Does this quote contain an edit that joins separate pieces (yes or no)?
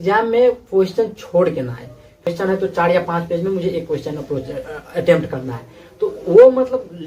yes